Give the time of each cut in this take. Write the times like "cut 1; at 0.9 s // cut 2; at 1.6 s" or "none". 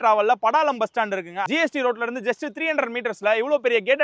cut 1; at 1.4 s